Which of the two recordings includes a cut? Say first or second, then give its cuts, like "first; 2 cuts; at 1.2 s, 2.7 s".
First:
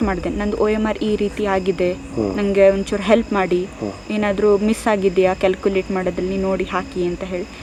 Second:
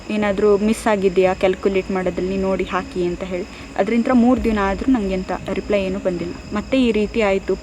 second; 1 cut; at 6.4 s